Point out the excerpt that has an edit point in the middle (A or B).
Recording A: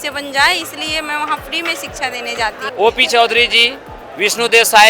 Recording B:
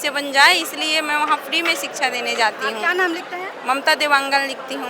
A